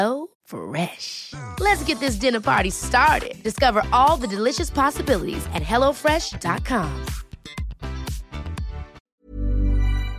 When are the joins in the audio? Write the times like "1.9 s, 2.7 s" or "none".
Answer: 9.1 s